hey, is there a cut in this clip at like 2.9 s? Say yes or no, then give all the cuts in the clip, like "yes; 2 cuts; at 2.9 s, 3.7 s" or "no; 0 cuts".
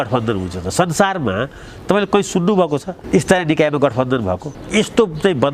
yes; 2 cuts; at 2.9 s, 4.5 s